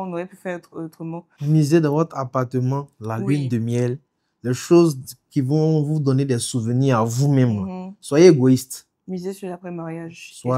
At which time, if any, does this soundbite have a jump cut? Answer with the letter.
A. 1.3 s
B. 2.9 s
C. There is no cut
A